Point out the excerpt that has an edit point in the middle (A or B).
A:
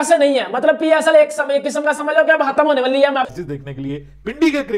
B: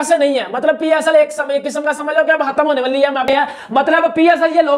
A